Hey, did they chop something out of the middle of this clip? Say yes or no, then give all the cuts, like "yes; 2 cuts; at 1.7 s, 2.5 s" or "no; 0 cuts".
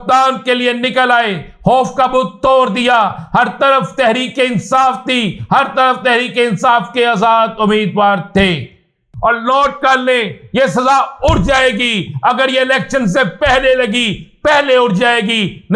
yes; 1 cut; at 9.1 s